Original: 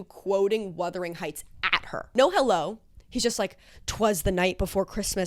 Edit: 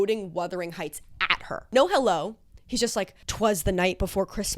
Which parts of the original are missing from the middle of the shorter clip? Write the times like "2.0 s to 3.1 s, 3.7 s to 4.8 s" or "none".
3.6 s to 3.8 s